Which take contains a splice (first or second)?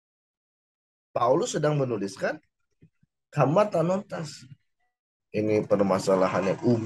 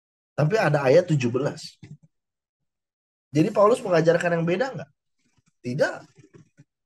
first